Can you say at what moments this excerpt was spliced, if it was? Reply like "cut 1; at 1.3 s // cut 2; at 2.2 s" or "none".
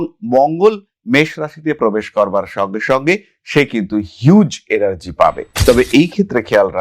cut 1; at 5.5 s